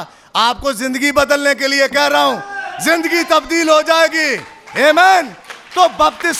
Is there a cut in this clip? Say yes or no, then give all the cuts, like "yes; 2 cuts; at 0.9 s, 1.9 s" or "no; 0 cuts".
no; 0 cuts